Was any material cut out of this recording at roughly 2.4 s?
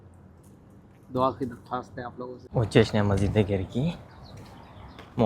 yes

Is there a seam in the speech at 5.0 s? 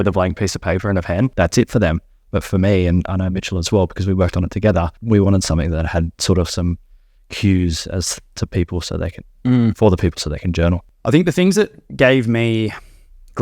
yes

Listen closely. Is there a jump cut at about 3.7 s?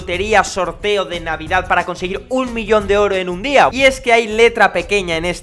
yes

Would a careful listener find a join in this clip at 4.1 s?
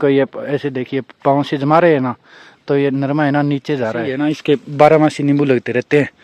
yes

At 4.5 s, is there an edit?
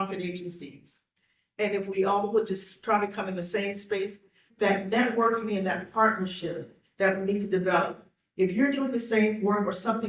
yes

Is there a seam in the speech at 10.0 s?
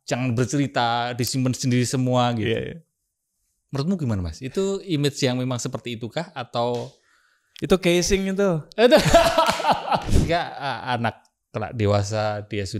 yes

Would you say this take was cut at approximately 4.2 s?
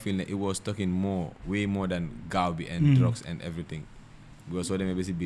no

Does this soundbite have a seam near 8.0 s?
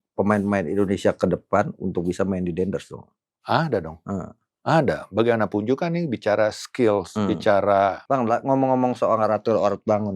yes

